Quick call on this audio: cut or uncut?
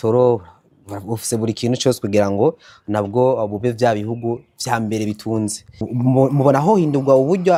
uncut